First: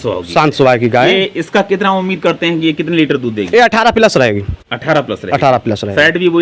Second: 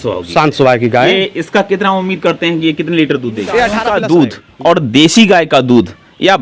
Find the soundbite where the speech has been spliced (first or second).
second